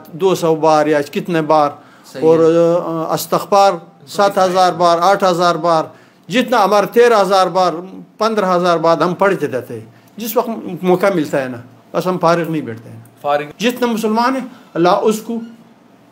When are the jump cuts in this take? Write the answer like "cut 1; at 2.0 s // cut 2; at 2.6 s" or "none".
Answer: cut 1; at 13.5 s